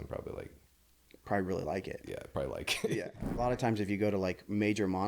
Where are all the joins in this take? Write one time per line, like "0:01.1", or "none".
0:03.1